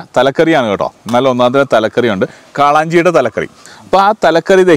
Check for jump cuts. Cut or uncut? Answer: cut